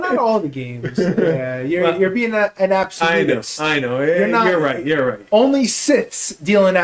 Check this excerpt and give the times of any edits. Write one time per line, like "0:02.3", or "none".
none